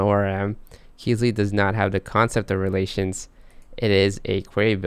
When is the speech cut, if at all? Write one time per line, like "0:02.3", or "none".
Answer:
none